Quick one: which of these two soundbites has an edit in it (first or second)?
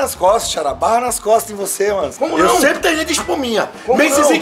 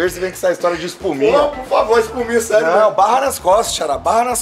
first